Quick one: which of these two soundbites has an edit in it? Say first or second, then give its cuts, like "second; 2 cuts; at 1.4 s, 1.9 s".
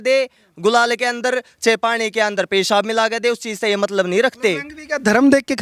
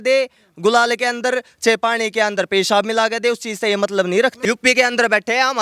second; 1 cut; at 4.4 s